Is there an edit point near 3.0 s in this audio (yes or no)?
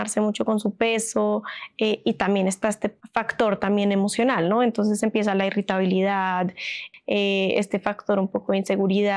yes